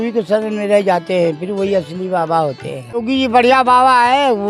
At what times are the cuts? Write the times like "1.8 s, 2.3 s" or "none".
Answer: 3.0 s

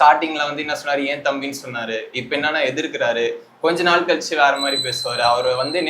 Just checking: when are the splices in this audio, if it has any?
none

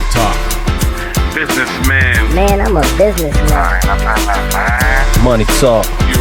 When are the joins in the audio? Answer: none

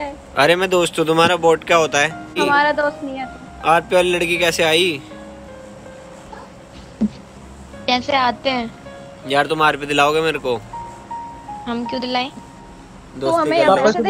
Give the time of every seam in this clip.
2.4 s

